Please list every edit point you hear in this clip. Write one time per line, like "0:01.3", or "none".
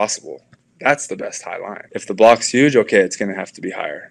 0:01.8